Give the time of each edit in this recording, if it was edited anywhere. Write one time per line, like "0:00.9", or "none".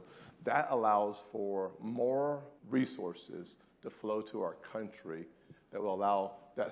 0:02.5